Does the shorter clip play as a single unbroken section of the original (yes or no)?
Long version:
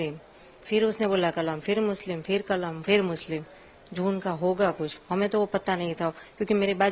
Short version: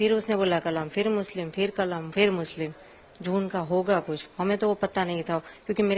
yes